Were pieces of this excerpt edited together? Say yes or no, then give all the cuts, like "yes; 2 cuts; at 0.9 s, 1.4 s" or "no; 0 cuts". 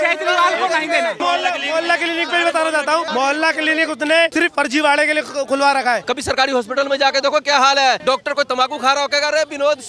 yes; 5 cuts; at 1.2 s, 3.1 s, 4.3 s, 6.0 s, 8.0 s